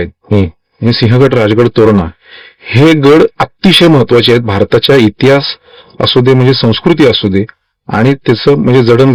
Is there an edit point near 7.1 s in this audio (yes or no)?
no